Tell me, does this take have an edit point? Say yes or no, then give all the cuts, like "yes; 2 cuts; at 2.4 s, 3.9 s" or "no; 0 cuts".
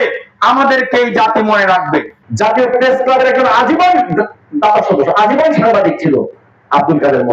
yes; 1 cut; at 2.2 s